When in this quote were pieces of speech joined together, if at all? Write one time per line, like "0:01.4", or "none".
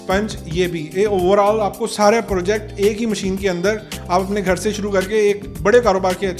none

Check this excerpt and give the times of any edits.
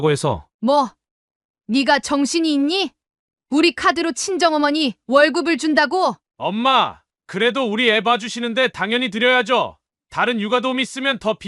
0:06.2

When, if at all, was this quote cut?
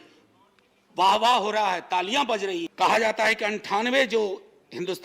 0:02.7

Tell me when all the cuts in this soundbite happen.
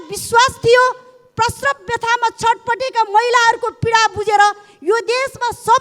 none

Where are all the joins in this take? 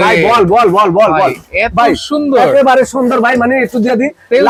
none

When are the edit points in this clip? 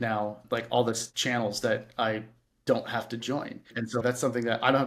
0:03.6

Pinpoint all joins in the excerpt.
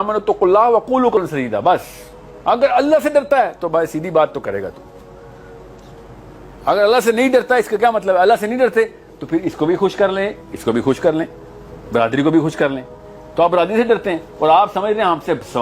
0:01.2

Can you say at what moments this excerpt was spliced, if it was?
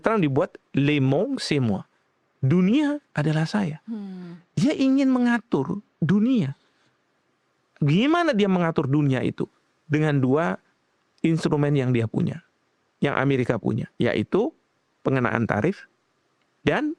none

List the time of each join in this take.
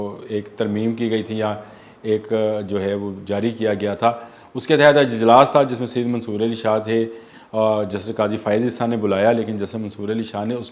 none

